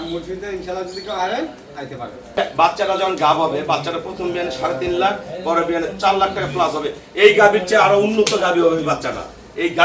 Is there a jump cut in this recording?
yes; 1 cut; at 2.4 s

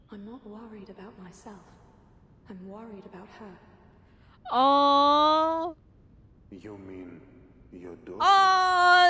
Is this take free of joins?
yes; 0 cuts

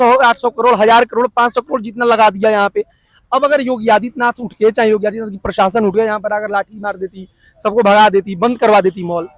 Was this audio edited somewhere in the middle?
no; 0 cuts

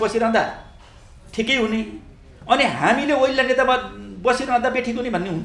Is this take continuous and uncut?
yes; 0 cuts

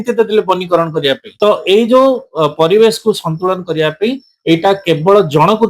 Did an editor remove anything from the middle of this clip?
yes; 1 cut; at 1.3 s

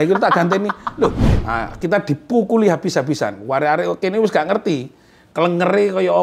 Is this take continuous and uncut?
no; 1 cut; at 1.3 s

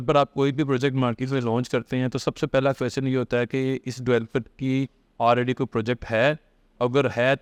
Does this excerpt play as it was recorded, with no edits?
yes; 0 cuts

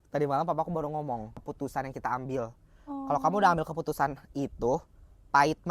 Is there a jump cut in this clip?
yes; 1 cut; at 1.4 s

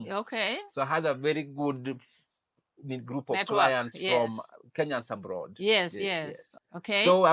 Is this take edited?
yes; 1 cut; at 6.4 s

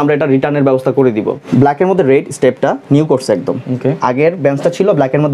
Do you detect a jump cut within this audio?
no; 0 cuts

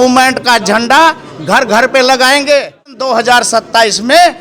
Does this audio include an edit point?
yes; 1 cut; at 3.0 s

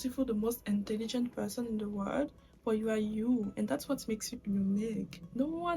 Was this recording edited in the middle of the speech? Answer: no; 0 cuts

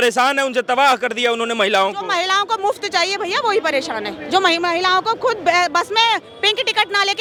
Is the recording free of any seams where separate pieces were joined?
yes; 0 cuts

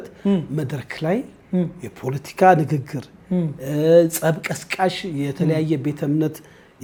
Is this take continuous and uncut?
yes; 0 cuts

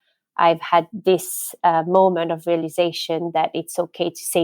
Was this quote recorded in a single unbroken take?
no; 1 cut; at 0.9 s

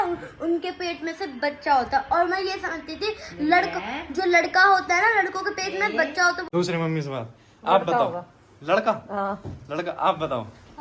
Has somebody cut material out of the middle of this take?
yes; 1 cut; at 6.4 s

